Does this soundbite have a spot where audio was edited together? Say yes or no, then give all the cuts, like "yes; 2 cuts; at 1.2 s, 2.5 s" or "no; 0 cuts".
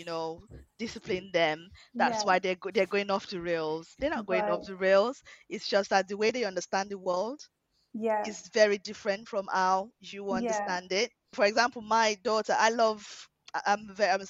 yes; 1 cut; at 11.3 s